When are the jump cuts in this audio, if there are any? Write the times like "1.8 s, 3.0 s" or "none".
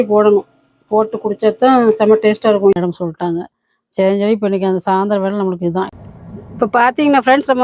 2.7 s, 5.9 s